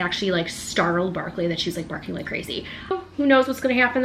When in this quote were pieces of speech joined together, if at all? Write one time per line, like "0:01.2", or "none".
0:02.9